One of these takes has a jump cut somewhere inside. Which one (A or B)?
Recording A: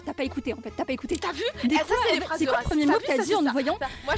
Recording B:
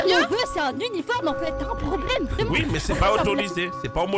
A